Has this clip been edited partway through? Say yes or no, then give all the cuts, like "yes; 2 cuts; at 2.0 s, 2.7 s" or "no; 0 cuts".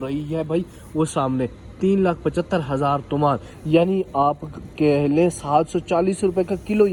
no; 0 cuts